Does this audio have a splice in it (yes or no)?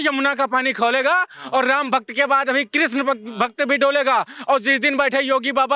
no